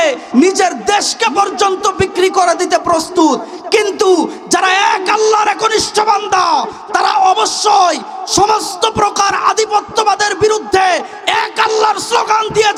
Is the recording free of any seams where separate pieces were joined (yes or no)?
yes